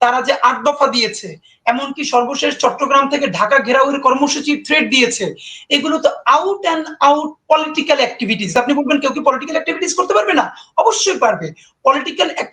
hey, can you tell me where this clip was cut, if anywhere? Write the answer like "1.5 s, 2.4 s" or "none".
8.5 s